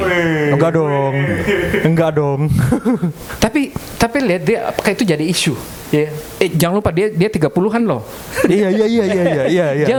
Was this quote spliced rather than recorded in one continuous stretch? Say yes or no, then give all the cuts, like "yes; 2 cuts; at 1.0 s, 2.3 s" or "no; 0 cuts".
no; 0 cuts